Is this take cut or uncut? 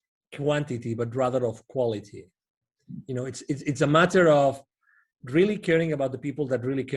uncut